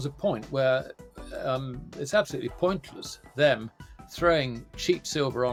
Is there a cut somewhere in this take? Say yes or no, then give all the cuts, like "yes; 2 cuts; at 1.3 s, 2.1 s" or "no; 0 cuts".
no; 0 cuts